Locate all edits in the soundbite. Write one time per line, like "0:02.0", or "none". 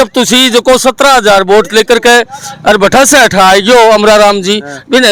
none